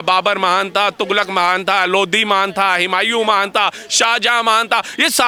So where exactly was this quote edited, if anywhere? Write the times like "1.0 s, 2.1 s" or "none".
none

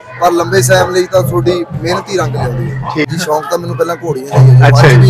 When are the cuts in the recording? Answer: 3.1 s

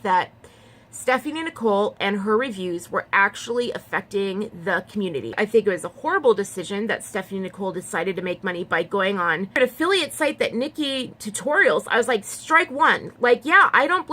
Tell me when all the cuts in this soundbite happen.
5.3 s, 9.6 s

